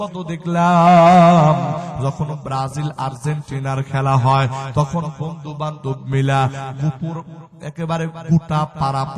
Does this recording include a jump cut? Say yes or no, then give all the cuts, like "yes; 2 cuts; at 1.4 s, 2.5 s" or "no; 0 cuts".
no; 0 cuts